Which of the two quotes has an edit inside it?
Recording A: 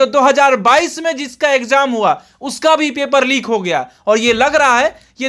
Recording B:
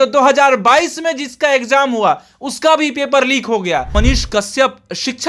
B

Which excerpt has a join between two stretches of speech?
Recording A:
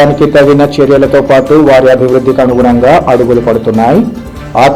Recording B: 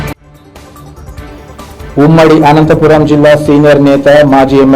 B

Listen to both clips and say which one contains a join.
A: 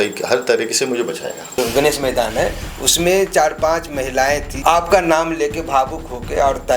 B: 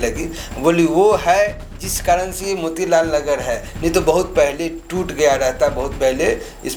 A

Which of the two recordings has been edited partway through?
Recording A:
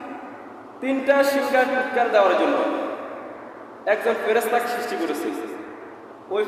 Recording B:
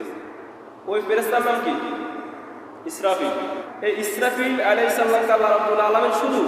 B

